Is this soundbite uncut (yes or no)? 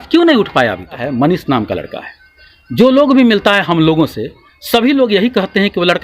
no